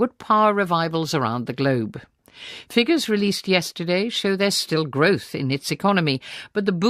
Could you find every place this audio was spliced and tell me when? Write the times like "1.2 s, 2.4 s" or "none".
none